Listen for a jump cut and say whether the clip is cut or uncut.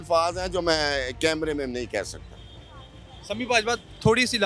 uncut